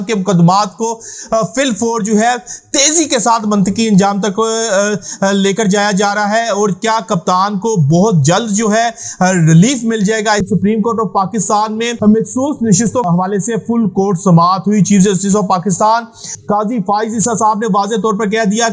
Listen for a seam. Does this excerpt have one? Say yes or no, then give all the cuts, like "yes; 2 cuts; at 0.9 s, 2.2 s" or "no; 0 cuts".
yes; 3 cuts; at 10.4 s, 11.9 s, 13.1 s